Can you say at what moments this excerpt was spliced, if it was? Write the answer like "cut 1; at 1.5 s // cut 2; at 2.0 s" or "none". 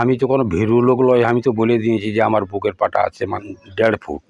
cut 1; at 3.4 s